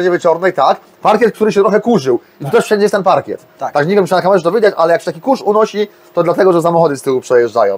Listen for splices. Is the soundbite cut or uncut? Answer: uncut